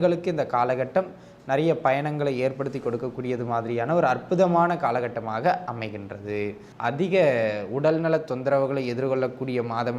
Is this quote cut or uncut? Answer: cut